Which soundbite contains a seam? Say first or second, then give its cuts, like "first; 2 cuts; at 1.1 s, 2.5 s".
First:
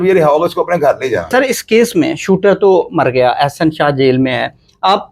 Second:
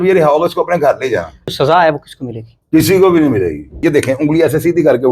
second; 2 cuts; at 1.5 s, 3.8 s